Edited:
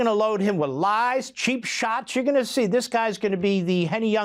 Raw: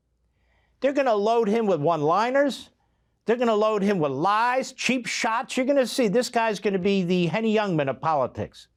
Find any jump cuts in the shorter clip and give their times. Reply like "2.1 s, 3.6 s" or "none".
none